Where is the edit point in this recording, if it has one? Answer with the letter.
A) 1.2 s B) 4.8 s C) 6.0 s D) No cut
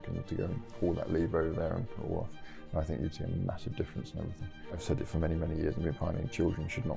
B